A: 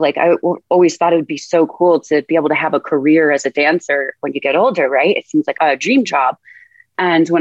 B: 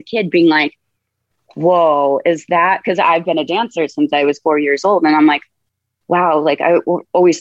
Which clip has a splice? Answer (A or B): A